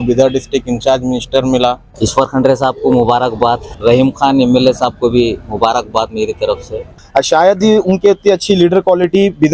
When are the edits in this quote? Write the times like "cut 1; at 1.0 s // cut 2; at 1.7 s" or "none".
cut 1; at 1.9 s // cut 2; at 3.7 s // cut 3; at 7.0 s